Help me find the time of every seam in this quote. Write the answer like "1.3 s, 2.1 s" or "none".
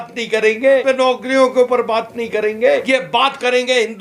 0.8 s, 2.8 s

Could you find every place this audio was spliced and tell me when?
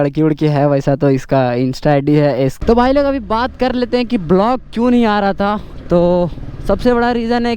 2.6 s

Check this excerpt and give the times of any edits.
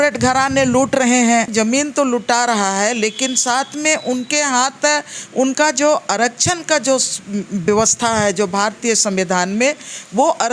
1.5 s

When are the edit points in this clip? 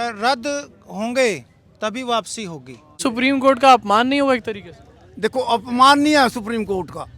3.0 s

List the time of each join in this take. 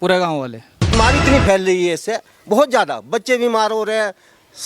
0.9 s

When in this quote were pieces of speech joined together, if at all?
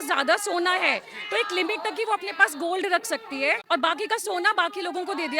3.6 s

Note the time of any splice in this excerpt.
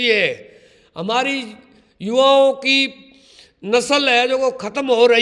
none

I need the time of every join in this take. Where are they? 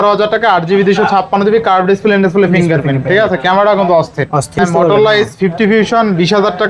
4.6 s

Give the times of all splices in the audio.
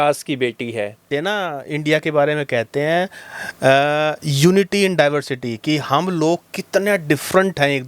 1.1 s

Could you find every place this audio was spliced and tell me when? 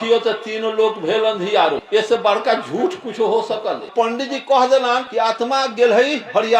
1.8 s, 3.9 s, 5.1 s

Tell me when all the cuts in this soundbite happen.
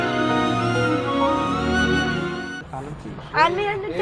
2.6 s

